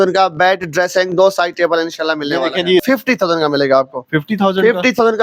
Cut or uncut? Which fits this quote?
cut